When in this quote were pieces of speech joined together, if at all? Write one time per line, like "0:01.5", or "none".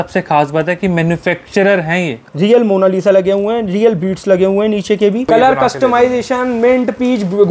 0:02.2
0:05.3